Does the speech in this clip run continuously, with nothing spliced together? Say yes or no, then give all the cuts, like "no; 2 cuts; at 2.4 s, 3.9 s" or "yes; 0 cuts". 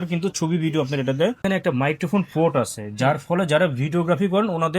no; 1 cut; at 1.4 s